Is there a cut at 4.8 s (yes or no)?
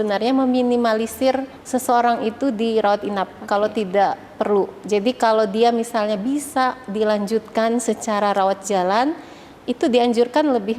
no